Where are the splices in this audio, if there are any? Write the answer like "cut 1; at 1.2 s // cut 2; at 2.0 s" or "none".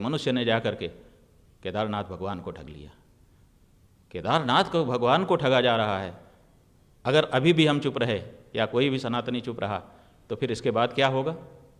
none